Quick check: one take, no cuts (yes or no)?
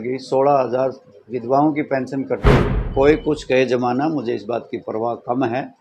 no